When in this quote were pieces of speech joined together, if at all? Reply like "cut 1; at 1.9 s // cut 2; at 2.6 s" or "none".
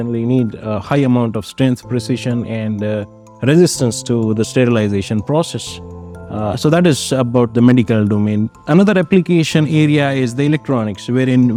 none

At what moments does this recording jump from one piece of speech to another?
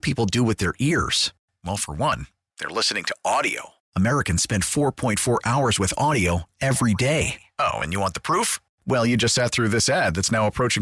none

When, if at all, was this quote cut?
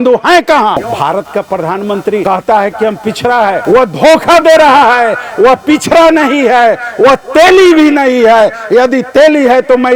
cut 1; at 0.9 s // cut 2; at 2.2 s // cut 3; at 3.6 s

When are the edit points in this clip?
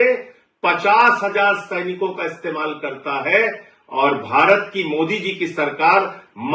none

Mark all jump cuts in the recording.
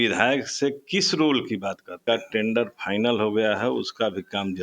cut 1; at 1.9 s

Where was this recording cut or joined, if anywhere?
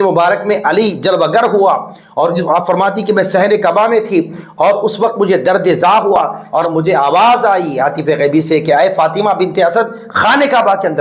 cut 1; at 6.4 s

